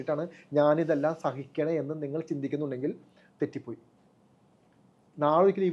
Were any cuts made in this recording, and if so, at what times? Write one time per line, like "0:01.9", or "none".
none